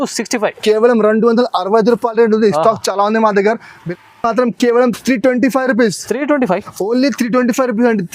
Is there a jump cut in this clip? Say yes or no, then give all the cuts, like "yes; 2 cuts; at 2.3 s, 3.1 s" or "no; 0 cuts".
yes; 1 cut; at 3.9 s